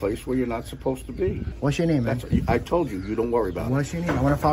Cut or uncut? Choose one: cut